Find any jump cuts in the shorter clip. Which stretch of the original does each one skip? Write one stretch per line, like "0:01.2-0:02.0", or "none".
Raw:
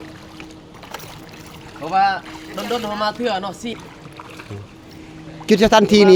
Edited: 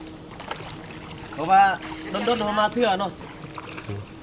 0:03.6-0:03.8